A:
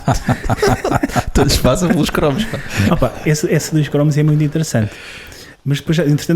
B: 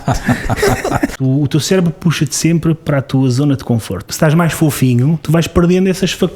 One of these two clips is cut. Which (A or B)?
B